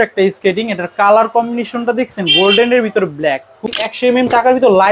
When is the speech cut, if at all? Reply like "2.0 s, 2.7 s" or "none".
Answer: 3.7 s